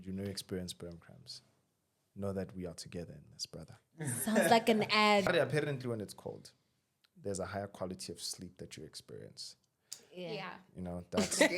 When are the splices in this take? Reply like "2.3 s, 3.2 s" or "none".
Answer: 5.3 s